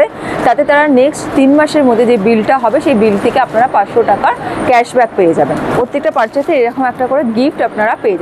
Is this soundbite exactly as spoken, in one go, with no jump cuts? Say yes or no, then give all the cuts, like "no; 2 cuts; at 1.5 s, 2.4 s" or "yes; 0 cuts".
no; 1 cut; at 5.7 s